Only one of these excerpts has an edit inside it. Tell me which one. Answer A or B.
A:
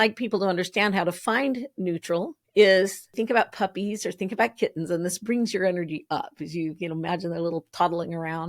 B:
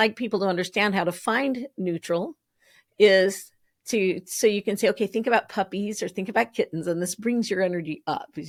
A